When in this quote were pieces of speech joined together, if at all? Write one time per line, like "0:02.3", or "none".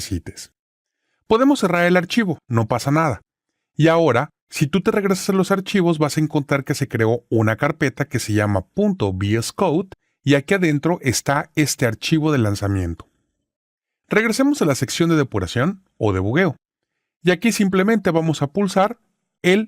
0:04.4

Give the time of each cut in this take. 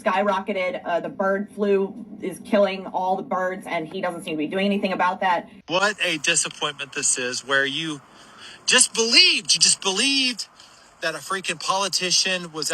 0:05.6

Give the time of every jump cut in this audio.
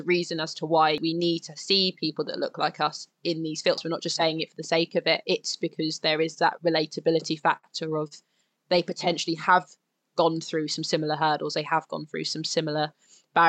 0:01.0
0:03.8

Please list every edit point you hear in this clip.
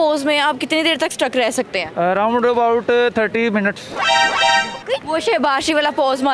0:01.8
0:05.0

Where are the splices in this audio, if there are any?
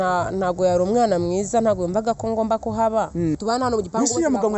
0:03.4

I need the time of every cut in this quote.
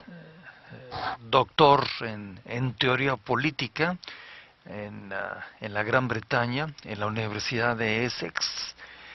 none

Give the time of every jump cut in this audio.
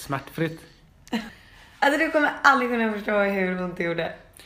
0:01.2

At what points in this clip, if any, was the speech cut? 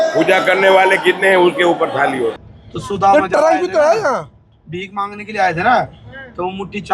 0:02.4

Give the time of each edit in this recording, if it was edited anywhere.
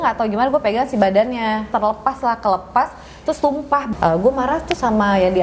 0:01.7
0:03.9

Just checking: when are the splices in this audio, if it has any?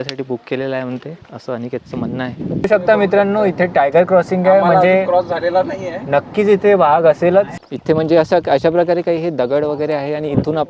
0:02.6
0:07.6

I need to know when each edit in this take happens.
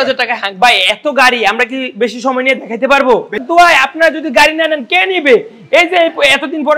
0:03.4

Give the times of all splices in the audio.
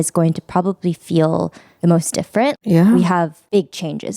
none

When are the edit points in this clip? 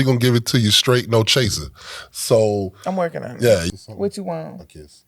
0:03.6

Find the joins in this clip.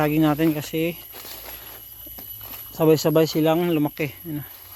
none

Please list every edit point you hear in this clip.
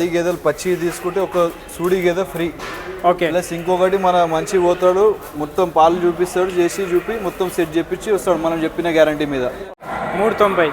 0:09.6

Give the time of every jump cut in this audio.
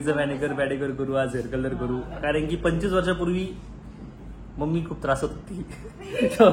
none

